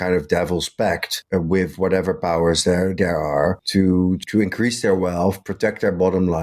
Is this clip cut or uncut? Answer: cut